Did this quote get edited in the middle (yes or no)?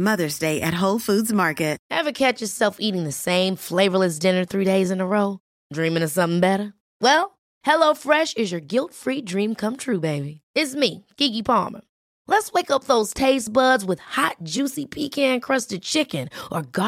yes